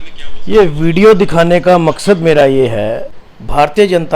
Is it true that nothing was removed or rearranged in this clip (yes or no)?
no